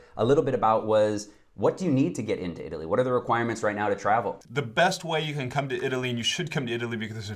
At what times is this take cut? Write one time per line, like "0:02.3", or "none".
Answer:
0:04.4